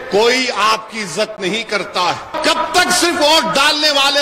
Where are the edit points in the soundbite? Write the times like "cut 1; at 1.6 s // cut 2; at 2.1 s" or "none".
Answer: cut 1; at 2.4 s

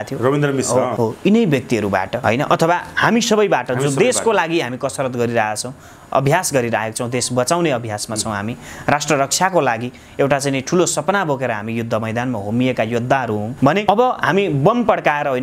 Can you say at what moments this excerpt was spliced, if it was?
cut 1; at 0.9 s // cut 2; at 2.2 s // cut 3; at 13.7 s

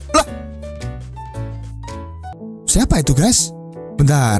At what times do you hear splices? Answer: cut 1; at 2.3 s

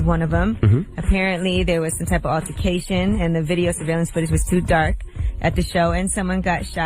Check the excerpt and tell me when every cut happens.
cut 1; at 5.2 s

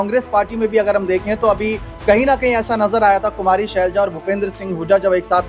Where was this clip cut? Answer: none

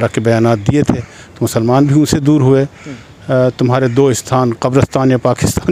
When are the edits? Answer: none

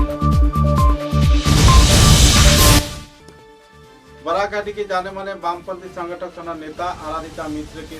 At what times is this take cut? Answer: cut 1; at 2.8 s

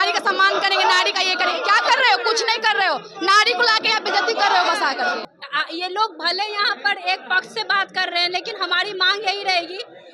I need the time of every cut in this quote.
cut 1; at 5.2 s

